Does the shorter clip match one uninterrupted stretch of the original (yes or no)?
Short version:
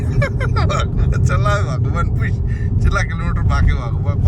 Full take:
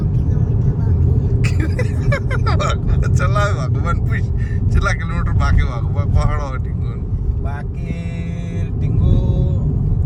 yes